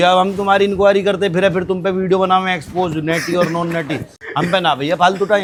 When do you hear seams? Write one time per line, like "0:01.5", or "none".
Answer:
none

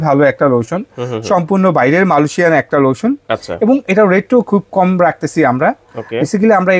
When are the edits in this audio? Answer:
none

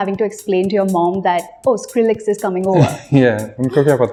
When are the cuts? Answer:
none

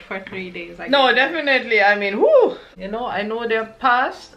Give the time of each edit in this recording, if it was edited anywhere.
0:02.7

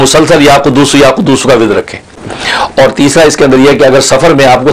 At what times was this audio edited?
0:02.3

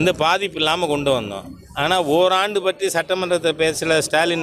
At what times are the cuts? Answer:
none

